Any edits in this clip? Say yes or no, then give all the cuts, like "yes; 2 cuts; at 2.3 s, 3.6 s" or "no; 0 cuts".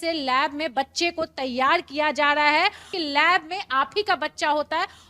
yes; 1 cut; at 2.9 s